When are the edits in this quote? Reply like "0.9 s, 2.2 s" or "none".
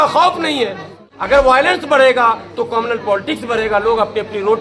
0.9 s